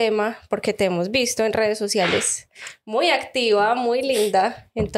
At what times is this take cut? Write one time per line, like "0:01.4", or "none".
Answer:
none